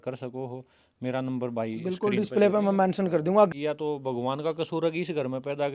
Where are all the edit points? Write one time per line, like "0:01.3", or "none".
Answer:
0:03.5